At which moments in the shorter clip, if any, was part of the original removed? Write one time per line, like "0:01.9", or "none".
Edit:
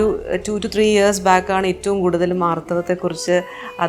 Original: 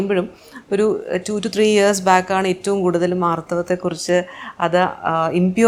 none